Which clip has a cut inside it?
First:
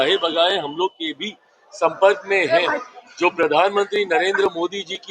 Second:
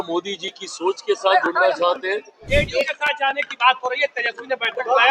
second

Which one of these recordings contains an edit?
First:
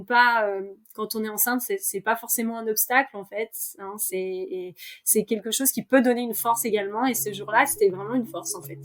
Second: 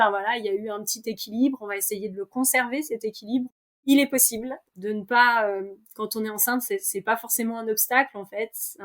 second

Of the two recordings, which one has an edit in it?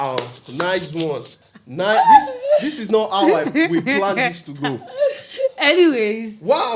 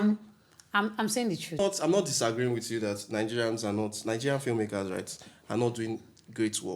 second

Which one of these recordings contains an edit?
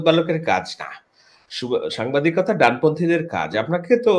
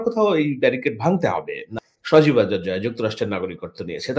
second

